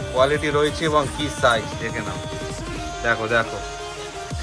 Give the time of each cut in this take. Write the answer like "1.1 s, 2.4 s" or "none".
none

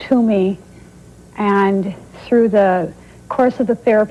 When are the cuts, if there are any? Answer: none

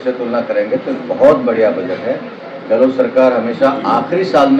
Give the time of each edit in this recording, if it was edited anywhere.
none

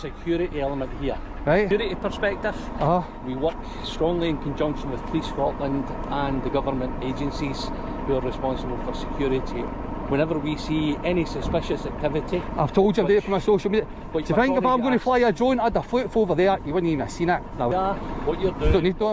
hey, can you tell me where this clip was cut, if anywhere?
1.7 s, 9.7 s, 17.7 s

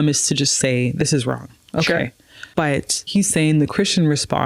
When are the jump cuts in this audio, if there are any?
2.6 s

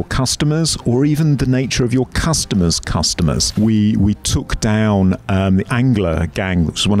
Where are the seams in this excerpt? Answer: 3.5 s

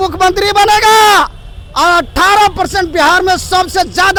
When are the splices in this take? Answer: none

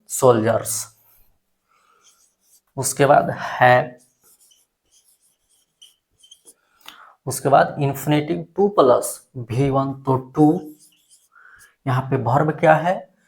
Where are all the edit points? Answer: 2.6 s

